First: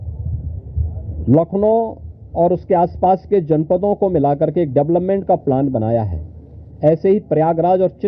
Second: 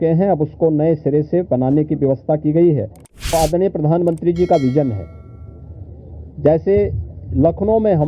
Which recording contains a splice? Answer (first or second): second